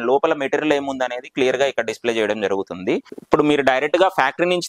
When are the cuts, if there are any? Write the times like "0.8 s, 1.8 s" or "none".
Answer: 3.1 s